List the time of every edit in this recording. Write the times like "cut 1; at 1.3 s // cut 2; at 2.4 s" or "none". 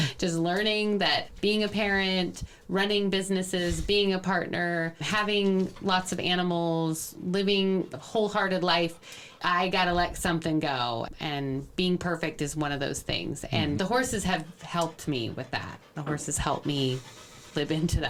none